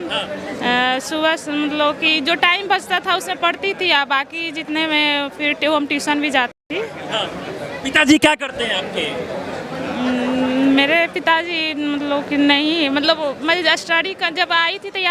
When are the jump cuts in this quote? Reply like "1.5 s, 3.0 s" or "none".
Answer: none